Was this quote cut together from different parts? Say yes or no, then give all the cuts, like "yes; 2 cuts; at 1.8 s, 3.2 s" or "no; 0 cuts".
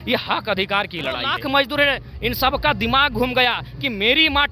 yes; 1 cut; at 1.3 s